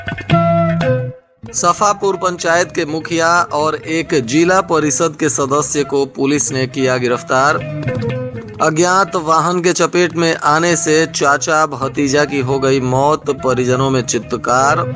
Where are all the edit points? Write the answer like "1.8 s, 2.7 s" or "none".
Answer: 1.1 s